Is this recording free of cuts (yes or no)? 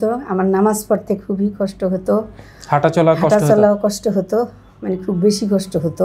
yes